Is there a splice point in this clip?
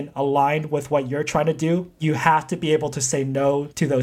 yes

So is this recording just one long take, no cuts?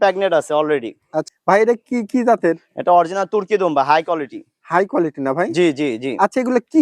no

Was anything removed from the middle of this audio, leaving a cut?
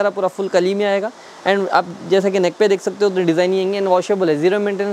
no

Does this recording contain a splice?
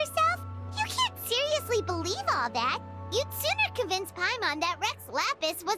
no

